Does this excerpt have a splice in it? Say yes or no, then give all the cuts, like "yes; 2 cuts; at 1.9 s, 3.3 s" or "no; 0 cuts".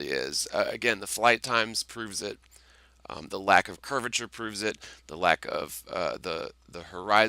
yes; 1 cut; at 1.3 s